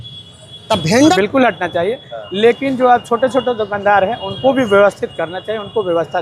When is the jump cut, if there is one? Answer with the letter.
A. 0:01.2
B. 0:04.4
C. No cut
A